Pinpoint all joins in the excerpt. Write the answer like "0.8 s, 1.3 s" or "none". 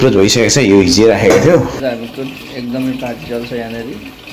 1.8 s